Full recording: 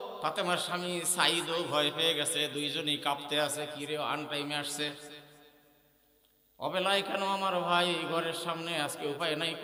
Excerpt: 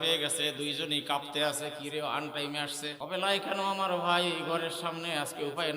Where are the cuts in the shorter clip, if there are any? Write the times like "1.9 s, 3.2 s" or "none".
3.0 s

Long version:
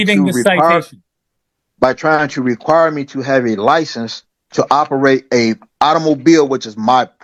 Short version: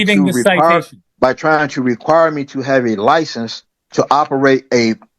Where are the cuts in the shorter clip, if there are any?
1.0 s

